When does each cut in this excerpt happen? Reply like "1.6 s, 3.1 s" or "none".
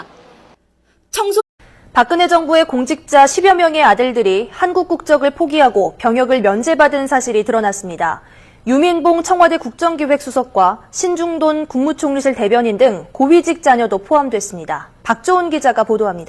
none